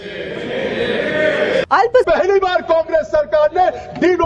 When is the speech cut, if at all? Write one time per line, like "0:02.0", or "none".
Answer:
0:01.7

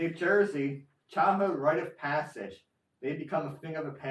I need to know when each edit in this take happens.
none

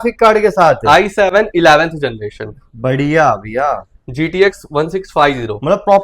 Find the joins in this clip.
none

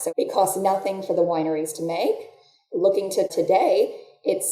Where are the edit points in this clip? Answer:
0:03.3

